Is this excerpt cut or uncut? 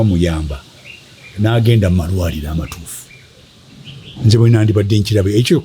uncut